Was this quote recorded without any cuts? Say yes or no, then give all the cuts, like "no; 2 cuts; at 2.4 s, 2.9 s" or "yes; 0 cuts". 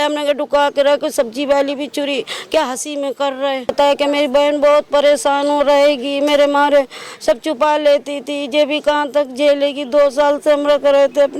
no; 1 cut; at 3.7 s